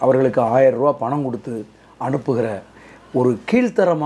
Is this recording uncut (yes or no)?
yes